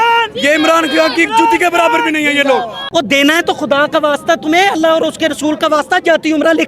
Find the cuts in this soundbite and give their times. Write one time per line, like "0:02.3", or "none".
0:02.8